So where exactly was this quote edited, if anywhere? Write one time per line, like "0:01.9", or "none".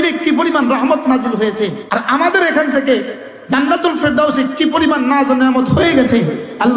0:01.8